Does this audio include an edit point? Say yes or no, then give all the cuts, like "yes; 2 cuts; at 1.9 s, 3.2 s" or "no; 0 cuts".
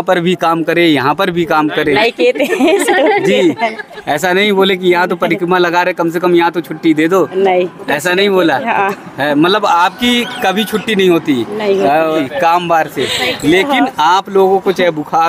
yes; 1 cut; at 12.2 s